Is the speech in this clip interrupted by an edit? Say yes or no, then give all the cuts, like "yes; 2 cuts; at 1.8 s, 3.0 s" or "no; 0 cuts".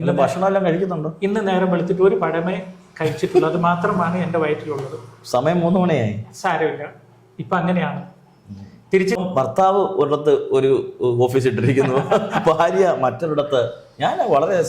yes; 1 cut; at 9.2 s